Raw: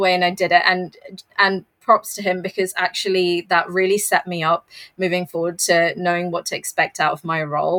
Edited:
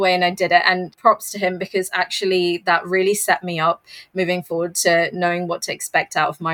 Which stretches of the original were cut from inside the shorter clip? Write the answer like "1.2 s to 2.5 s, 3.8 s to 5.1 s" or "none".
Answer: 0.9 s to 1.7 s